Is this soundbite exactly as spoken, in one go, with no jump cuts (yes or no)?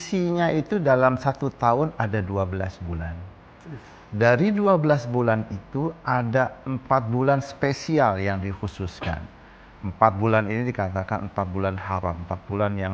yes